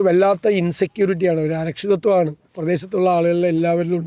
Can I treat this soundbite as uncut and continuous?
no; 1 cut; at 2.5 s

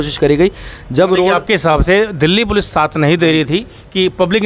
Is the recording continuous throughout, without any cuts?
yes; 0 cuts

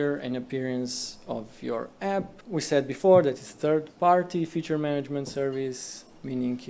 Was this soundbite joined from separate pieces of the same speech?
yes; 1 cut; at 2.4 s

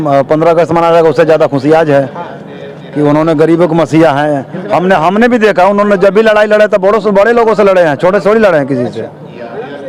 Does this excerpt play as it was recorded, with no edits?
yes; 0 cuts

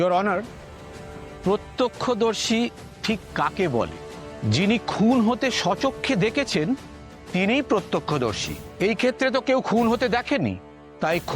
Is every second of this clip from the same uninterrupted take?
no; 1 cut; at 0.9 s

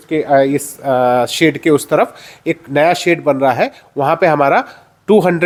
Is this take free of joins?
yes; 0 cuts

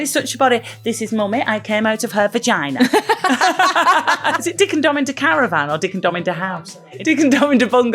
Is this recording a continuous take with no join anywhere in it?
no; 2 cuts; at 4.5 s, 6.9 s

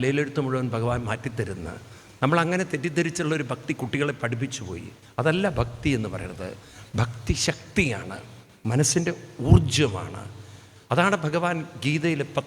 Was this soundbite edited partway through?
no; 0 cuts

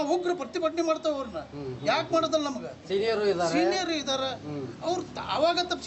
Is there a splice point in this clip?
no; 0 cuts

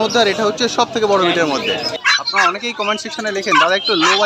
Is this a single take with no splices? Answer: no; 1 cut; at 2.0 s

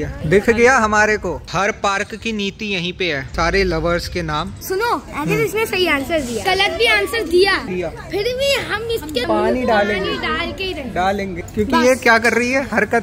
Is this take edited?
yes; 5 cuts; at 1.4 s, 4.7 s, 6.4 s, 7.6 s, 11.4 s

